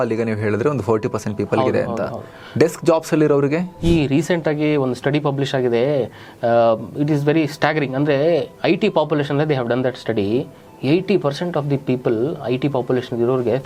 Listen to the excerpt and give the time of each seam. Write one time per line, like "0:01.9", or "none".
none